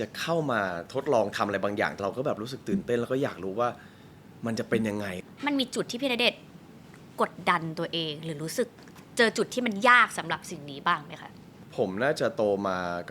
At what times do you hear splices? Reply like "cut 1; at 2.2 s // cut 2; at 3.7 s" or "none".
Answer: cut 1; at 2.0 s // cut 2; at 5.2 s